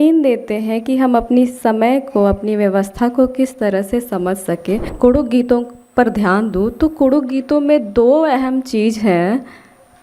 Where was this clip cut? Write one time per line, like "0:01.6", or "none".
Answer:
0:04.9